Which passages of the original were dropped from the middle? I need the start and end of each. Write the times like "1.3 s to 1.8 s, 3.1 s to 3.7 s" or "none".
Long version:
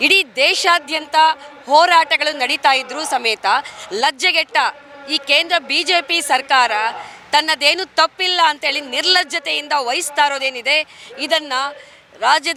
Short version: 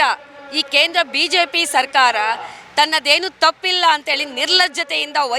none